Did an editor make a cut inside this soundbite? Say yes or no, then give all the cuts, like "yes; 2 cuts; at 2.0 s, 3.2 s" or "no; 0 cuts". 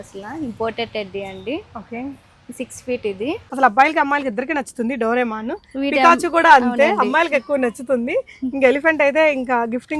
yes; 1 cut; at 3.4 s